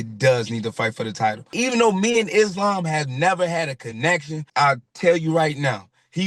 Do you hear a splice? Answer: yes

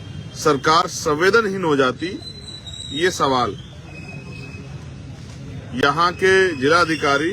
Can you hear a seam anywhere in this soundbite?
no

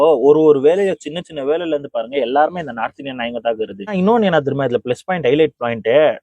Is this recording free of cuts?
no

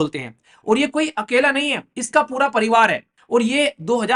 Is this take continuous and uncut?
no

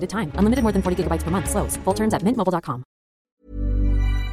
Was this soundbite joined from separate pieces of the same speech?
yes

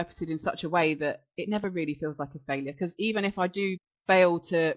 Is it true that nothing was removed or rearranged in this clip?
no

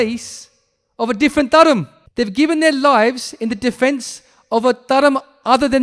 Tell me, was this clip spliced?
yes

